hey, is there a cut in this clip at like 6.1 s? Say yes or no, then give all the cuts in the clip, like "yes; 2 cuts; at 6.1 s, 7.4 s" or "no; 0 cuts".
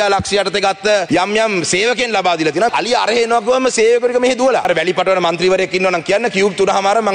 no; 3 cuts; at 1.0 s, 2.7 s, 4.7 s